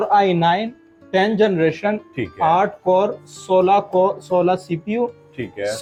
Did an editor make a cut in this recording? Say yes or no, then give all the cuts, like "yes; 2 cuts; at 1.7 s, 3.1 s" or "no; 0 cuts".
no; 0 cuts